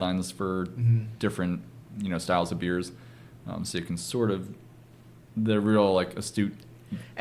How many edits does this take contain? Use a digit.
0